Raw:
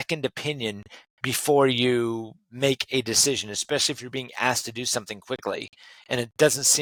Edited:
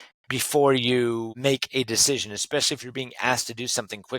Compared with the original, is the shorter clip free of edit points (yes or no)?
no